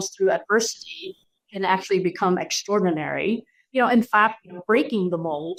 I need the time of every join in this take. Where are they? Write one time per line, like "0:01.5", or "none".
none

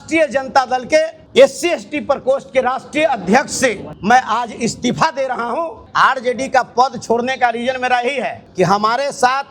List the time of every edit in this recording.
0:01.2
0:03.9
0:05.8
0:08.4

